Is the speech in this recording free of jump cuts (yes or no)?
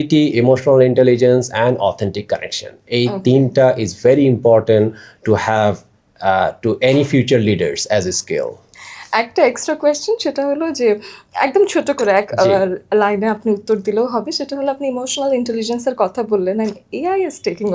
yes